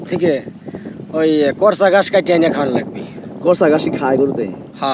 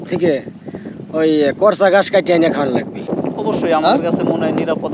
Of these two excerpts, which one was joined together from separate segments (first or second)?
second